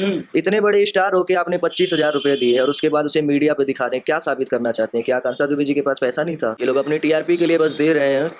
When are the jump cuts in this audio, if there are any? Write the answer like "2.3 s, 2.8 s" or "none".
6.6 s